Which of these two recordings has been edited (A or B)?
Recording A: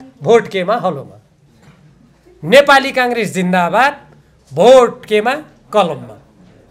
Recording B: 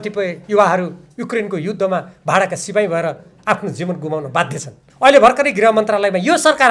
B